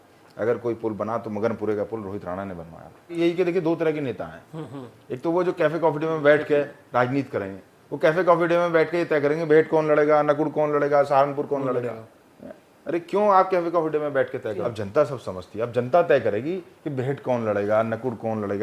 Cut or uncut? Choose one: cut